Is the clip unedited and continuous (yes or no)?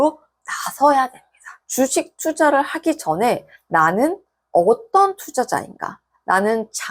yes